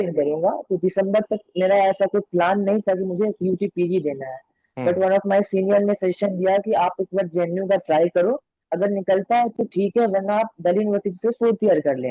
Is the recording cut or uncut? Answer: uncut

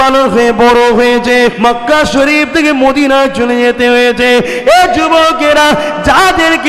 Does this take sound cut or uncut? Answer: cut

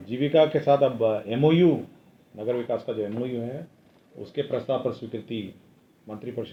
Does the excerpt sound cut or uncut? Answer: uncut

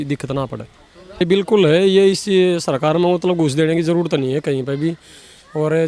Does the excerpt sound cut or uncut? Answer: cut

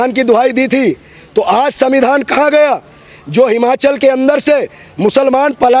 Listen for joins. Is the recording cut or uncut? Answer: uncut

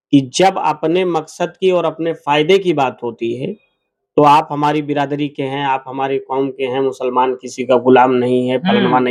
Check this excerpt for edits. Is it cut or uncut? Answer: uncut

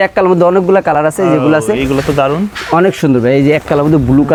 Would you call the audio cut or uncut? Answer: uncut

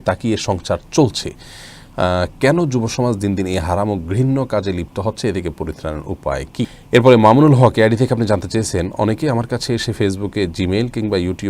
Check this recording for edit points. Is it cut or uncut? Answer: cut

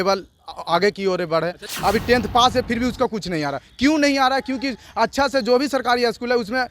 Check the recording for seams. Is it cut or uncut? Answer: cut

